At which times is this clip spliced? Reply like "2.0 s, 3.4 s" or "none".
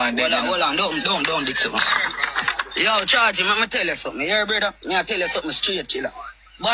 none